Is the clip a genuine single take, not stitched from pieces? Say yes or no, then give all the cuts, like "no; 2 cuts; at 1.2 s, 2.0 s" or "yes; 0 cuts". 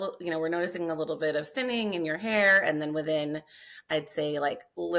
yes; 0 cuts